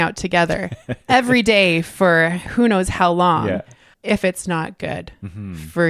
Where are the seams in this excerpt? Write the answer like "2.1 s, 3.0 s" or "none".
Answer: 3.9 s